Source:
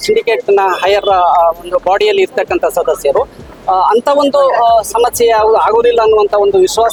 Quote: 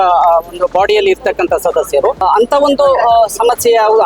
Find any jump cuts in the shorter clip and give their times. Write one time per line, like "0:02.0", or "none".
0:02.2